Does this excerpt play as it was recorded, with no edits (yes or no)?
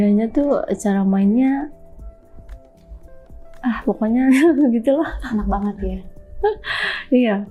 yes